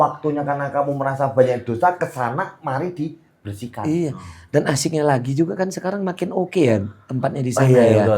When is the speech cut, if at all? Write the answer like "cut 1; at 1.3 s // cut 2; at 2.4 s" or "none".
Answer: none